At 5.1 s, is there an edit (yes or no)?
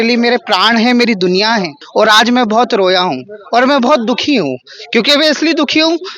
no